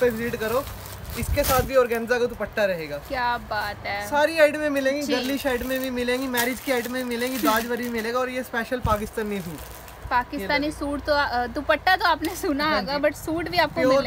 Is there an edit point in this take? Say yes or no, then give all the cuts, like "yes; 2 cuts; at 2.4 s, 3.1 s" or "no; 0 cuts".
no; 0 cuts